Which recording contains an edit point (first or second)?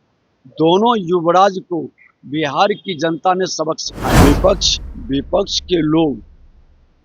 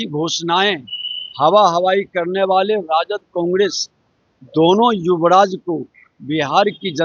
first